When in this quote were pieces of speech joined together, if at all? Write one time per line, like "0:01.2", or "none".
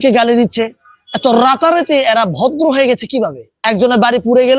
0:03.5